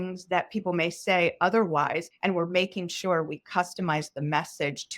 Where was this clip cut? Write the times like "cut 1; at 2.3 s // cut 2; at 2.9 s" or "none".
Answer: cut 1; at 2.1 s